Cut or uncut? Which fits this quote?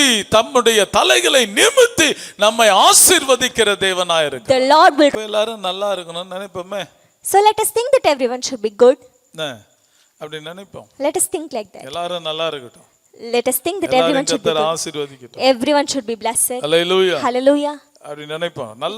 cut